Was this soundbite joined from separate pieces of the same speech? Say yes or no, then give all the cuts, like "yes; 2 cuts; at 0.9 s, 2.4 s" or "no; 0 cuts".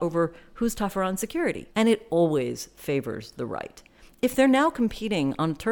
yes; 1 cut; at 1.6 s